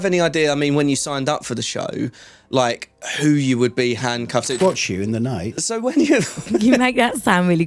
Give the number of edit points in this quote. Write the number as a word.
one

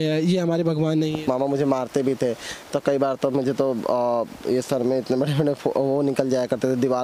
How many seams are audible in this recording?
one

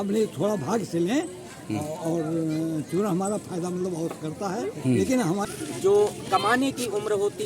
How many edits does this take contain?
one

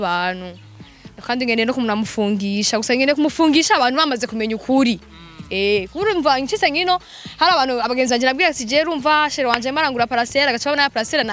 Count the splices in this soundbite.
zero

